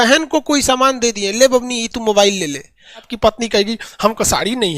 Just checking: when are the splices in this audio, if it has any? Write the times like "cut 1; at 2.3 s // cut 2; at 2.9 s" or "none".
cut 1; at 3.1 s